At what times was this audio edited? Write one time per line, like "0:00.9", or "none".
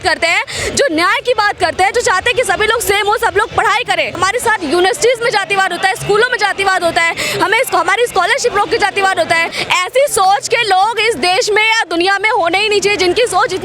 0:04.1
0:09.6